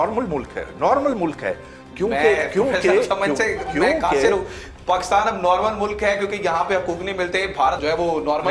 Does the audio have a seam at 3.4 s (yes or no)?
no